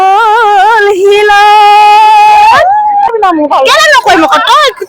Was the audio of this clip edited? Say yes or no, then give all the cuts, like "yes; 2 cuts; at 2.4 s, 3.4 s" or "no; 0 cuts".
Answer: yes; 1 cut; at 3.1 s